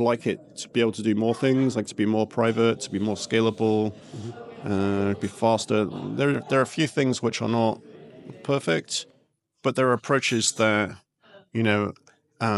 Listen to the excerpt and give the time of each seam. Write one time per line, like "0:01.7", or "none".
none

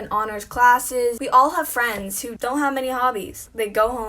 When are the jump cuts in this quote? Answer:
0:01.2

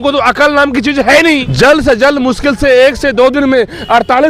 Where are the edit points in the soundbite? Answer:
0:01.5

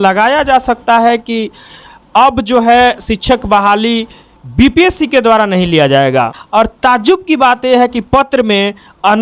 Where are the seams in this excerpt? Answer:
0:06.3

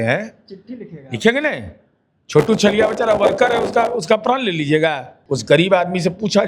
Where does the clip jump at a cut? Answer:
0:05.1

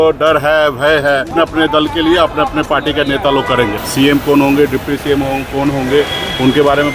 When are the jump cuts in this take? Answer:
0:01.3
0:03.7

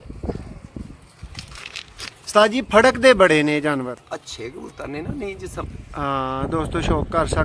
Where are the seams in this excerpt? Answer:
0:05.6

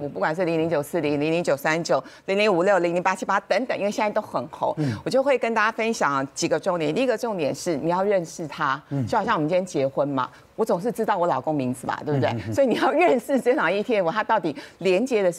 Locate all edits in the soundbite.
none

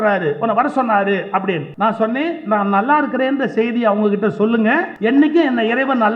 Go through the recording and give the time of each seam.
0:01.7
0:04.9

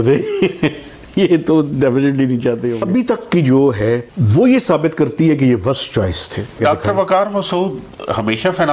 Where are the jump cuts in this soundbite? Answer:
0:02.7
0:06.6

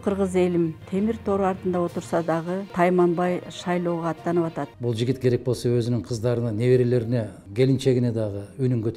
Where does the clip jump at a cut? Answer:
0:00.8
0:02.7
0:04.7
0:07.4

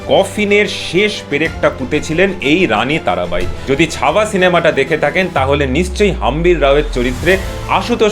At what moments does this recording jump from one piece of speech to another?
0:03.5

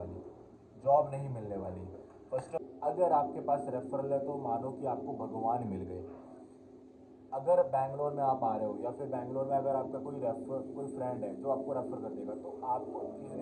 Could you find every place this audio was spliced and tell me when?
0:02.6

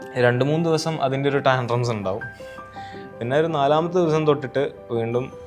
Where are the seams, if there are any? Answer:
none

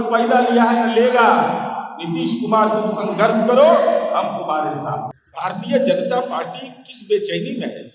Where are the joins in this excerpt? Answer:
0:05.2

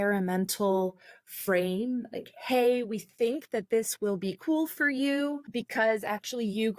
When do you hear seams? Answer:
0:05.5

